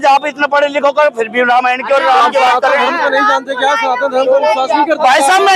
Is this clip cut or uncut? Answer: uncut